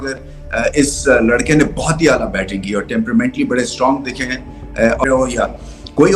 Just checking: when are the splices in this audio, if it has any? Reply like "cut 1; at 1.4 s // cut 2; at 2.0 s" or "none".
cut 1; at 5.0 s

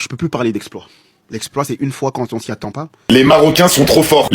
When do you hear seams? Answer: cut 1; at 2.9 s

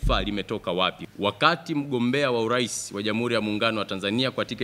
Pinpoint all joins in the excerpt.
cut 1; at 1.0 s

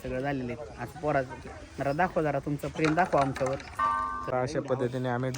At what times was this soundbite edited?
cut 1; at 4.3 s

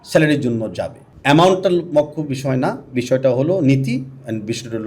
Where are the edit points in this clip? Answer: cut 1; at 1.0 s

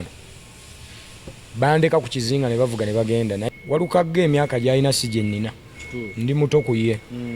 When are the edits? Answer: cut 1; at 3.4 s

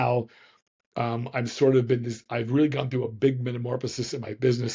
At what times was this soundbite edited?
none

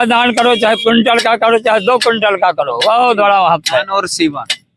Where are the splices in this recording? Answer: none

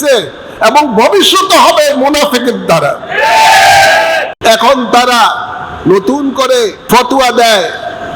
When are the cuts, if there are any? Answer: cut 1; at 4.3 s // cut 2; at 6.8 s

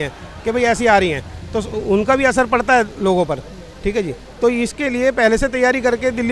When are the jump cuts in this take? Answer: none

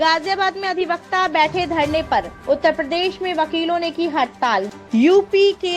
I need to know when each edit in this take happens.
cut 1; at 4.7 s

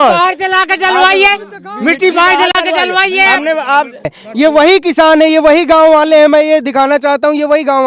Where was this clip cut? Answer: cut 1; at 4.2 s

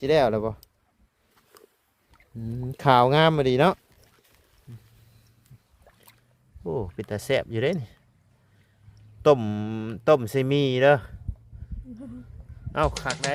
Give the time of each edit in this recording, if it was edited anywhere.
none

